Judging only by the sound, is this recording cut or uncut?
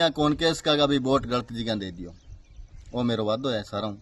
uncut